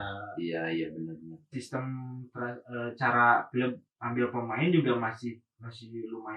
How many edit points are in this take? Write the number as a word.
one